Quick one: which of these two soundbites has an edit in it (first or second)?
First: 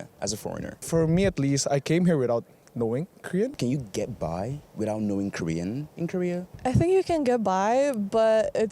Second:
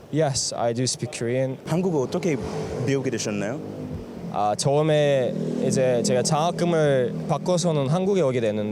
first